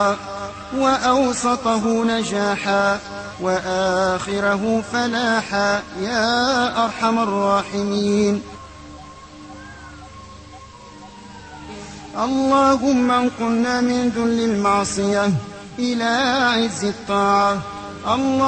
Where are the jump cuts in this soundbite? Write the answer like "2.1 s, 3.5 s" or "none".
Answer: 6.7 s